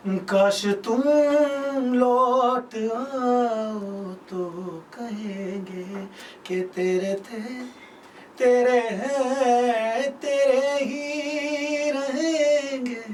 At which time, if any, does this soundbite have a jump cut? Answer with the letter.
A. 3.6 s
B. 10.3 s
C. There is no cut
C